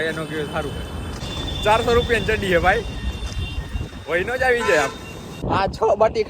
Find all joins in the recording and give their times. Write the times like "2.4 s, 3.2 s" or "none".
1.2 s, 5.4 s